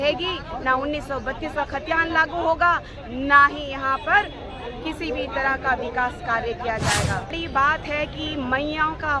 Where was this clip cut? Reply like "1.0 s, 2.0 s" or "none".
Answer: 7.3 s